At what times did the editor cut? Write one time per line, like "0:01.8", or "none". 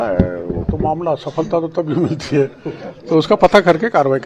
none